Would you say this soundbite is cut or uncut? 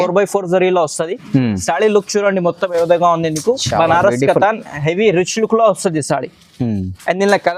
uncut